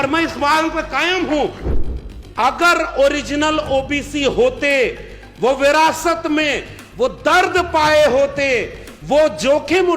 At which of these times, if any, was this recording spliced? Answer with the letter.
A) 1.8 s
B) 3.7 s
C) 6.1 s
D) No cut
A